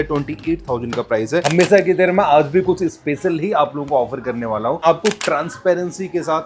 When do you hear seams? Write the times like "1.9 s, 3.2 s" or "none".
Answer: 1.5 s, 4.8 s